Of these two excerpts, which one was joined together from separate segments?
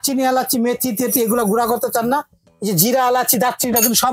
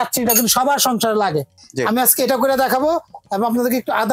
second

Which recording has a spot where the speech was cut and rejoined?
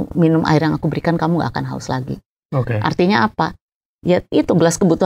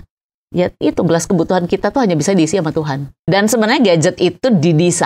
second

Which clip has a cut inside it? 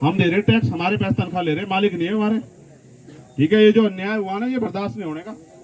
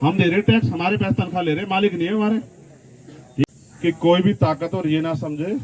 second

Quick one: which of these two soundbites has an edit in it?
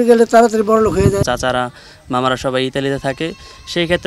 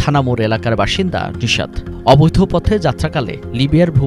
first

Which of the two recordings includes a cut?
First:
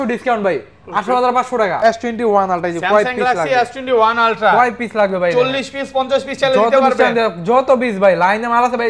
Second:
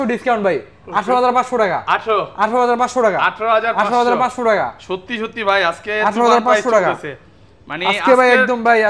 first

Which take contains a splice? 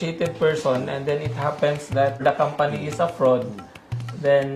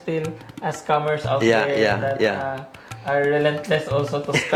first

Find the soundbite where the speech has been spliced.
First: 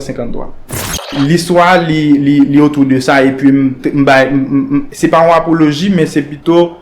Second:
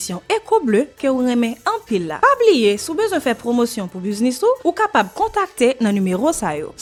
first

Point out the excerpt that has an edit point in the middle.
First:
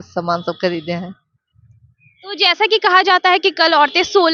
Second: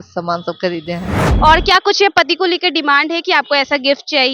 second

